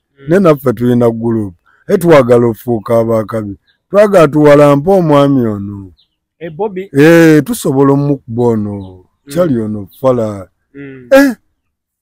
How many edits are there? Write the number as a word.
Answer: zero